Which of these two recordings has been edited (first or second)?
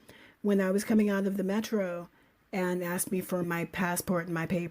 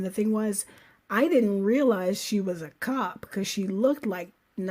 first